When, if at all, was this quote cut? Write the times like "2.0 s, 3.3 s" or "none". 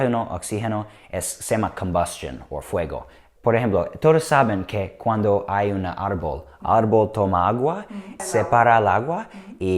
3.2 s, 8.2 s